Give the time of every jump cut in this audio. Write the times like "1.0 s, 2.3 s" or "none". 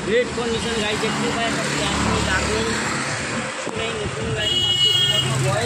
none